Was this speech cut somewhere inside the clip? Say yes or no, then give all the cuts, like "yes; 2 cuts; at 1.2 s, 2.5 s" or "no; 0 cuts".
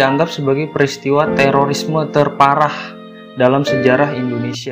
no; 0 cuts